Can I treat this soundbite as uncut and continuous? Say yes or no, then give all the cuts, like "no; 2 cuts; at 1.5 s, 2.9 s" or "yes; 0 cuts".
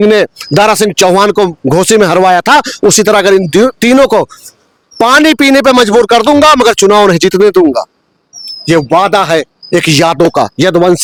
yes; 0 cuts